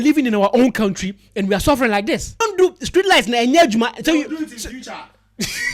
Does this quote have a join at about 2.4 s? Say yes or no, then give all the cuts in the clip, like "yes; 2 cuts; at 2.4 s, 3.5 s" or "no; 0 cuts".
yes; 1 cut; at 2.4 s